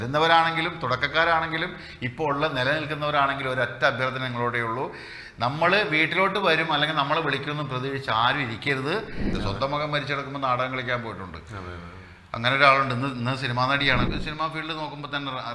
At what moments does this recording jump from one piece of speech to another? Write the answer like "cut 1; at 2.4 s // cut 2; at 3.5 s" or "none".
cut 1; at 9.2 s // cut 2; at 14.1 s